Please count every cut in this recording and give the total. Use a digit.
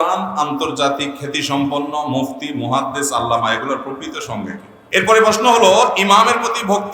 1